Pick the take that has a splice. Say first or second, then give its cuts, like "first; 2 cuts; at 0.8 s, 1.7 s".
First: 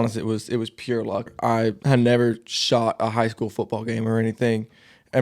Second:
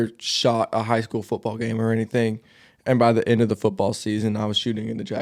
first; 1 cut; at 1.3 s